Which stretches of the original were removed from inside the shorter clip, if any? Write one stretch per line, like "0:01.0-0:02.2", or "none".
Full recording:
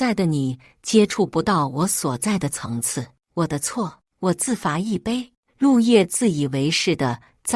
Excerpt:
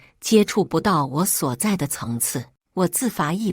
0:03.2-0:04.0